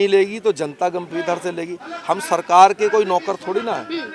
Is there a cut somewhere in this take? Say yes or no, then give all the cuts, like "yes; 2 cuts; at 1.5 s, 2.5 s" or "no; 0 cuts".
no; 0 cuts